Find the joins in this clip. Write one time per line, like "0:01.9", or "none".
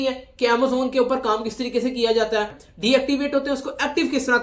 0:02.6